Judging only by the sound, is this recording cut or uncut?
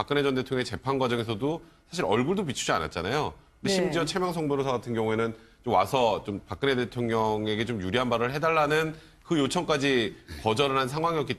cut